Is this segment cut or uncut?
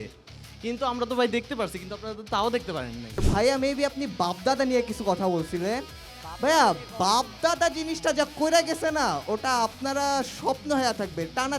cut